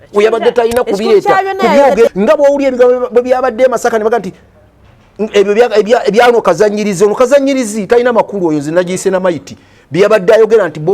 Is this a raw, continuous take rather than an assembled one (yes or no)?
no